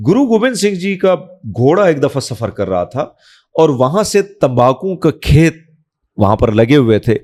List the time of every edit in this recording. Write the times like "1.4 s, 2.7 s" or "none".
none